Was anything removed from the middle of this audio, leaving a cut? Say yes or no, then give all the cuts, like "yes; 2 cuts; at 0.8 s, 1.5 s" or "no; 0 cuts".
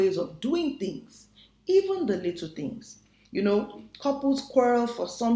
no; 0 cuts